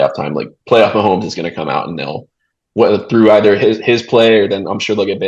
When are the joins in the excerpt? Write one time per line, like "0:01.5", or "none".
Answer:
none